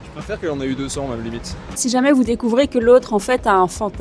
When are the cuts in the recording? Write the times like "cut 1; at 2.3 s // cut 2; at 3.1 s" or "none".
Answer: cut 1; at 1.7 s